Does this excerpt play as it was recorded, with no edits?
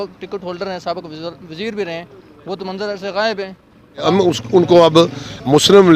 no; 1 cut; at 4.0 s

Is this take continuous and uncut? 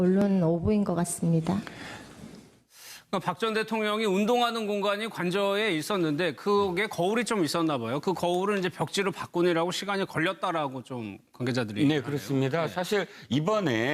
no; 1 cut; at 9.0 s

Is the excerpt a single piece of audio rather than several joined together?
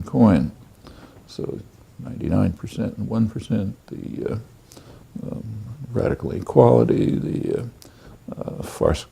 no; 1 cut; at 2.8 s

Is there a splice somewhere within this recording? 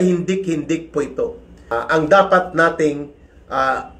yes; 1 cut; at 1.5 s

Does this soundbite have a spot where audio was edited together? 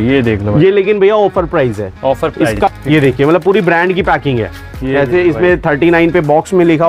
yes; 1 cut; at 2.5 s

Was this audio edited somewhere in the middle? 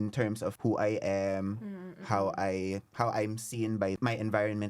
yes; 2 cuts; at 2.9 s, 4.0 s

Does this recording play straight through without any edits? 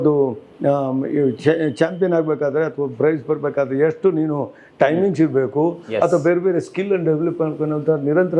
yes; 0 cuts

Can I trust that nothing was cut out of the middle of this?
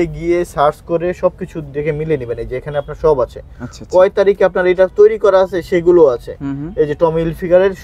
yes; 0 cuts

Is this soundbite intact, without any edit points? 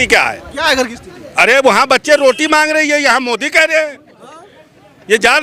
yes; 0 cuts

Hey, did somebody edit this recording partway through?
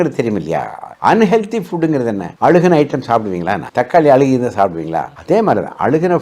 yes; 2 cuts; at 2.2 s, 3.6 s

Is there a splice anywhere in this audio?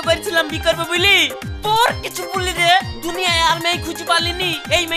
no; 0 cuts

